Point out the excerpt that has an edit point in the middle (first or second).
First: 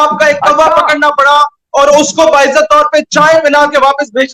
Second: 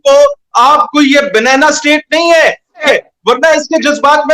second